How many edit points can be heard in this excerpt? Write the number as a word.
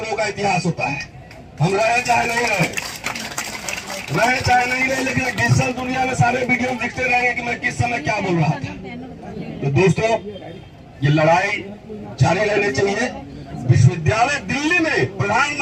zero